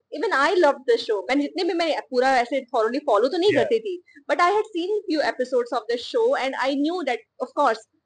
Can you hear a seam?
no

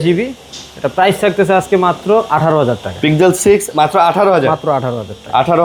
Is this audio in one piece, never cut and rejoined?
yes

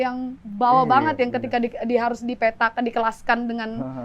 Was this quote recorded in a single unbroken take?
yes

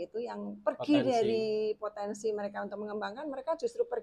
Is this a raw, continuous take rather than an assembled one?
yes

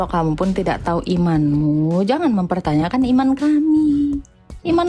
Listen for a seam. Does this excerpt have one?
no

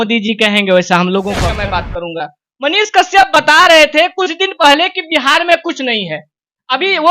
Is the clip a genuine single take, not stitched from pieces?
no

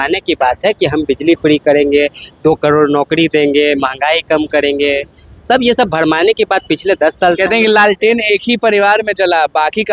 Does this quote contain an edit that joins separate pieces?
no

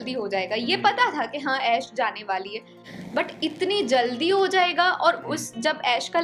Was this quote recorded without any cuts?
yes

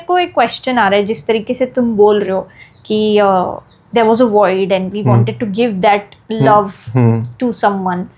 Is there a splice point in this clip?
no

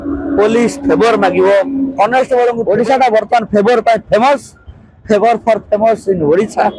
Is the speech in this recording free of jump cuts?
no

